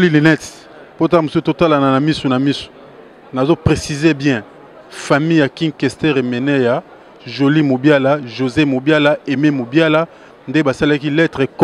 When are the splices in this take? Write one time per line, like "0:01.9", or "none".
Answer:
none